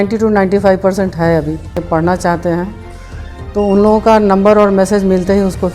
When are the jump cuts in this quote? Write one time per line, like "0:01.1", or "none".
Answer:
0:01.8